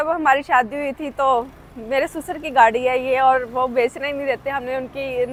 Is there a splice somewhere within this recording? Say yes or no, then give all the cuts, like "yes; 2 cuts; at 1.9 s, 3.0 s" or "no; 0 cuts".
no; 0 cuts